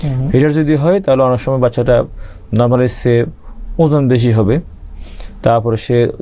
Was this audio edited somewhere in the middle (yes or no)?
no